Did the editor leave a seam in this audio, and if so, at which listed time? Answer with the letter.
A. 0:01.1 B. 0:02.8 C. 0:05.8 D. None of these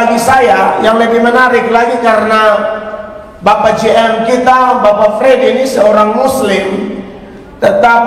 D